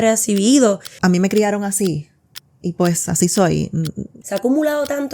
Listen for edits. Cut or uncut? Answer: cut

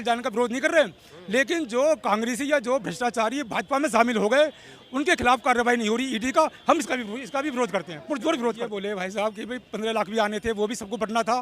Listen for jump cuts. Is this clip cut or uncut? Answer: cut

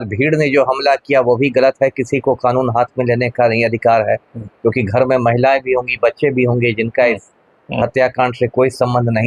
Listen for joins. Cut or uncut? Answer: uncut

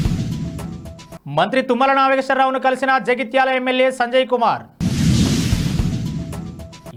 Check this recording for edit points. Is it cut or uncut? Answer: uncut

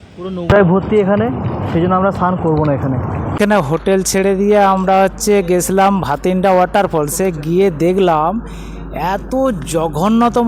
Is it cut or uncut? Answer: cut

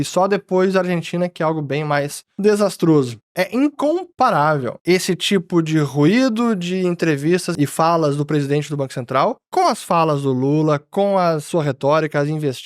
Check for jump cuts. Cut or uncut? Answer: cut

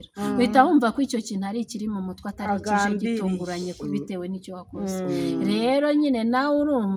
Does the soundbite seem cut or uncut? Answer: uncut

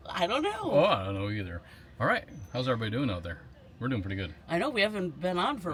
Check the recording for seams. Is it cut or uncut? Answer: uncut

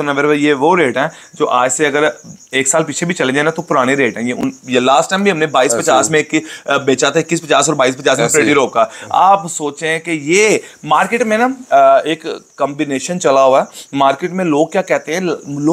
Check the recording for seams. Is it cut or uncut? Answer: uncut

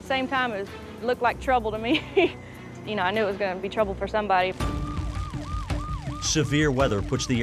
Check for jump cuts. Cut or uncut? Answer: uncut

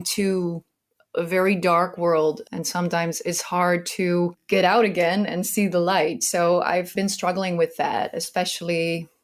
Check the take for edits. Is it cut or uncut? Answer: uncut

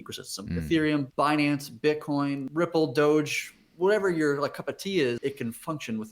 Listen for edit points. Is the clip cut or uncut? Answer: cut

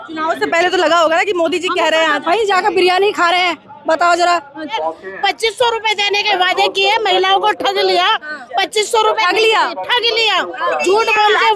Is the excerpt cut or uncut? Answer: cut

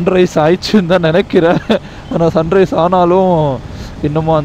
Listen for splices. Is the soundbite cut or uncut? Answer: uncut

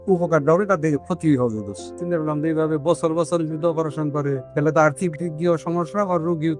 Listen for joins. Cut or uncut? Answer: cut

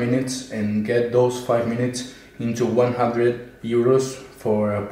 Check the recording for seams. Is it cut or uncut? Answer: uncut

